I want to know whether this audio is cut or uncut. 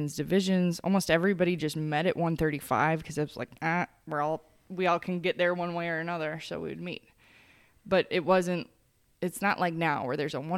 uncut